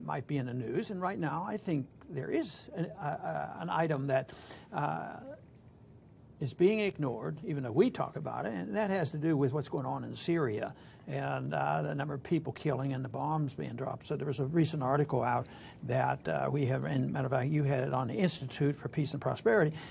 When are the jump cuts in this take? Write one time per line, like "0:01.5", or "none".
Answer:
0:06.3